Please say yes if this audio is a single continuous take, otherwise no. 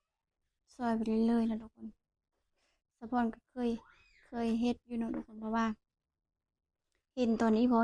yes